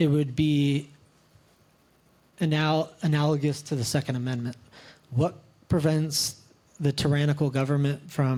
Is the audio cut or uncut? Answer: uncut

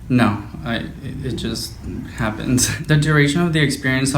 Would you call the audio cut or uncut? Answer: cut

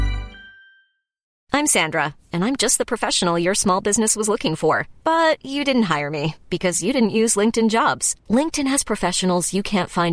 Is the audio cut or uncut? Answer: cut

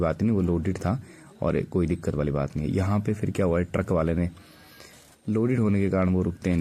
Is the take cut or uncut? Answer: uncut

